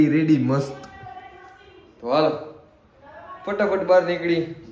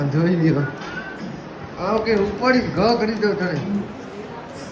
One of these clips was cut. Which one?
second; 2 cuts; at 1.1 s, 3.6 s

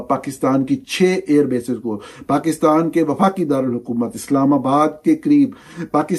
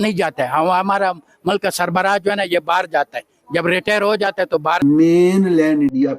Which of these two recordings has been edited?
second; 1 cut; at 4.8 s

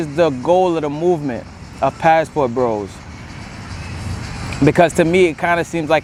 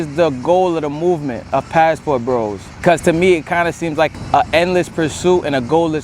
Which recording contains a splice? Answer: second; 3 cuts; at 1.4 s, 2.8 s, 4.1 s

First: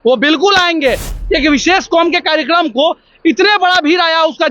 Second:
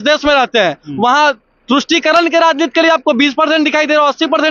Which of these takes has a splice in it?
first; 1 cut; at 1.1 s

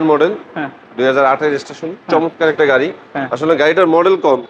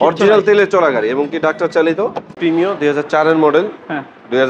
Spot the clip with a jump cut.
second; 1 cut; at 2.3 s

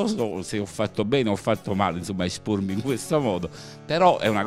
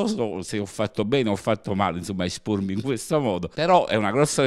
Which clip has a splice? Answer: second; 1 cut; at 3.5 s

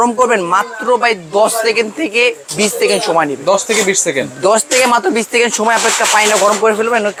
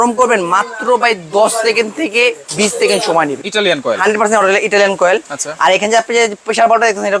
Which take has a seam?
second; 1 cut; at 3.4 s

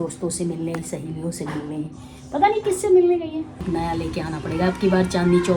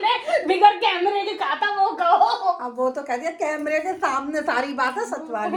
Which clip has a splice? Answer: first; 1 cut; at 3.6 s

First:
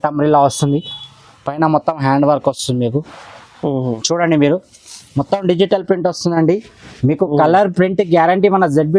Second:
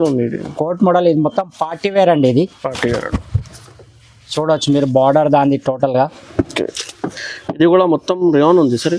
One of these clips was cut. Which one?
first; 1 cut; at 4.0 s

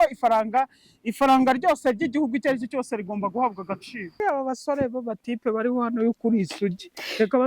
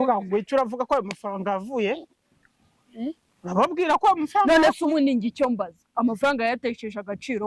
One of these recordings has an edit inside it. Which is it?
first; 1 cut; at 4.2 s

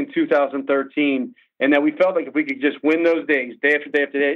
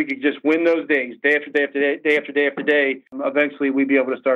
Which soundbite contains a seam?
second; 1 cut; at 3.2 s

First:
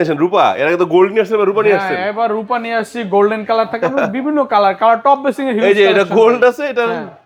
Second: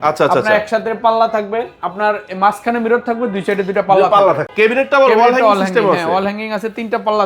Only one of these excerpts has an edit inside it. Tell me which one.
second; 1 cut; at 4.5 s

